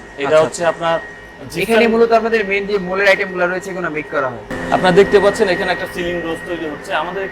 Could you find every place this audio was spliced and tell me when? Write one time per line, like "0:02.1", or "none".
0:04.4